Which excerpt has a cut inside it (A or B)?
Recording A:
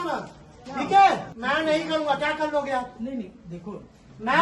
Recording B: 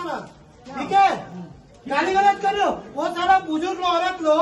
A